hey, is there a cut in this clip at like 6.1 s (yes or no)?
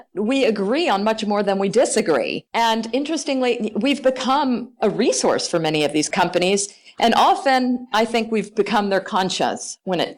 yes